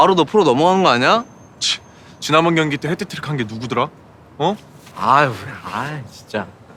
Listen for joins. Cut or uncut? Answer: uncut